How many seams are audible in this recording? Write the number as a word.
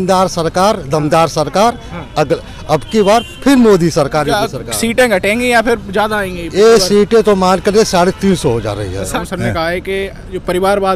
one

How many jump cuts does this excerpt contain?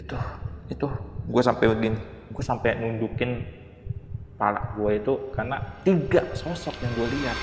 one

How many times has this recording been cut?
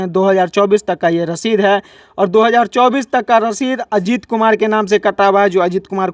zero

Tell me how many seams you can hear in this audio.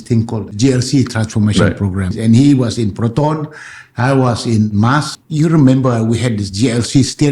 two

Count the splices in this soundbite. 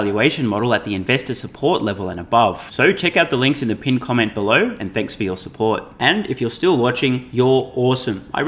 zero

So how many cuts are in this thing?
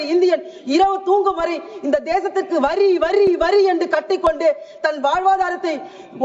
zero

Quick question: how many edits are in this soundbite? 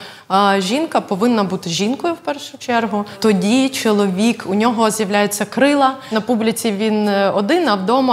two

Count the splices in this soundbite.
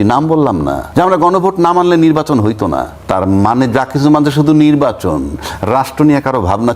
two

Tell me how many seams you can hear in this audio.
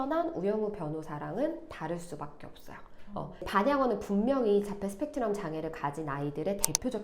one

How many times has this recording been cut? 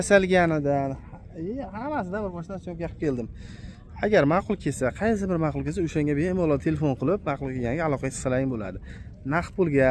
zero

